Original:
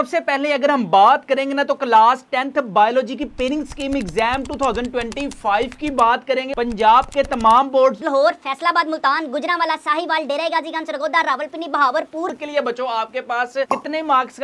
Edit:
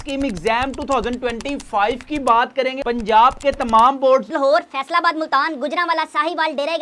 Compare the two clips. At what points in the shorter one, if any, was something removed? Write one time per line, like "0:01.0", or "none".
none